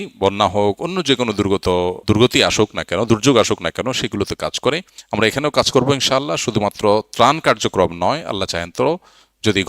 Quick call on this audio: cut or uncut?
cut